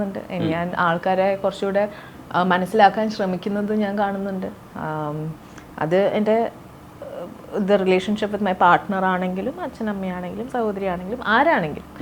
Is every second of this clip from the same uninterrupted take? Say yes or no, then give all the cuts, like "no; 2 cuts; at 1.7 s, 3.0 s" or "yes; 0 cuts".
yes; 0 cuts